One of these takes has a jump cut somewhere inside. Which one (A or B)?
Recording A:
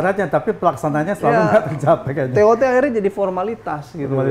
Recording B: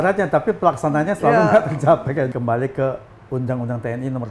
B